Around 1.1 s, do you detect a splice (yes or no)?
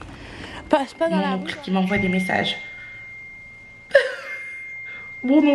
yes